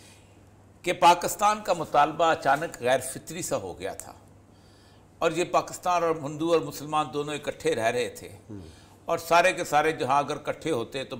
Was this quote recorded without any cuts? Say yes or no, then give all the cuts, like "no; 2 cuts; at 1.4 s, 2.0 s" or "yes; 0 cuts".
yes; 0 cuts